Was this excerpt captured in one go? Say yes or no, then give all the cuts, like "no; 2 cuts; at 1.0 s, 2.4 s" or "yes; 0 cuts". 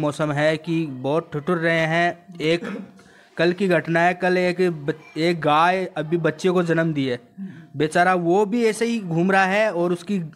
yes; 0 cuts